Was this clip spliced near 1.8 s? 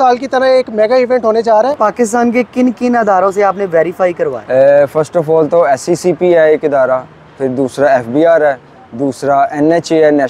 yes; 2 cuts; at 1.8 s, 4.4 s

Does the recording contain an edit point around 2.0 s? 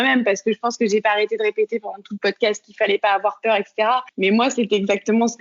no; 1 cut; at 4.1 s

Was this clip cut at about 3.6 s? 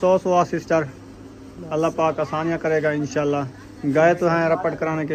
no; 0 cuts

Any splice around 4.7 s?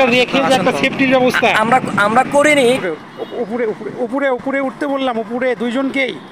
no; 1 cut; at 2.8 s

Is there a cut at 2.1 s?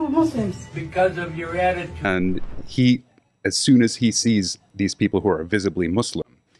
yes; 1 cut; at 2.1 s

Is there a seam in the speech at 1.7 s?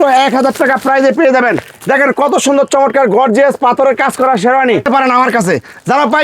no; 1 cut; at 4.9 s

